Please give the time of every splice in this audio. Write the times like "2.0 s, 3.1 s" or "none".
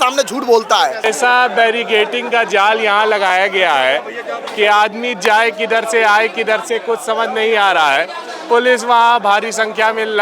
1.0 s